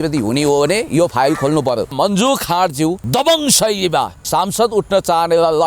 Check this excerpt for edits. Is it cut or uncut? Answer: cut